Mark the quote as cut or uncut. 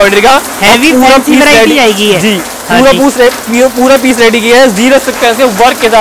uncut